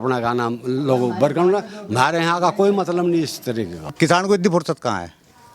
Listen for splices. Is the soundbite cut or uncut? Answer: cut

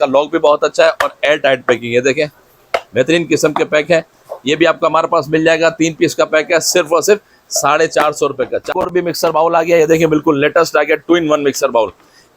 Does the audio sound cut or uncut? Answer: cut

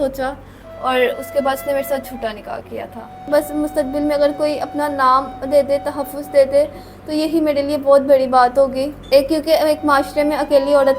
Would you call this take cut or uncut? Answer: cut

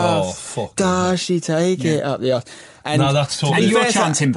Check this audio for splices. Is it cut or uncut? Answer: uncut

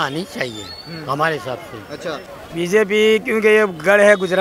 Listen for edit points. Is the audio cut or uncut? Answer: cut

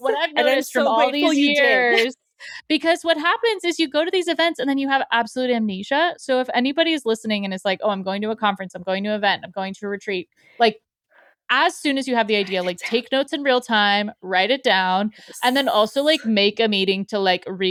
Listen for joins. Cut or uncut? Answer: uncut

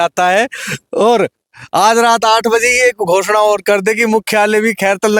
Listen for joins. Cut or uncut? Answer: uncut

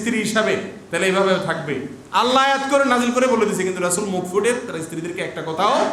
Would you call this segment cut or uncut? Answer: uncut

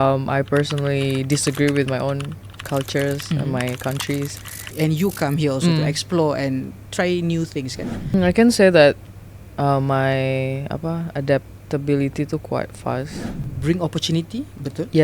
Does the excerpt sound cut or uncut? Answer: cut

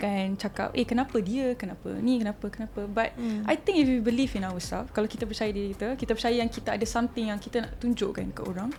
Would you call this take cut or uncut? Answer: uncut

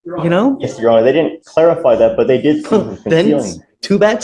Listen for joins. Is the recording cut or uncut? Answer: uncut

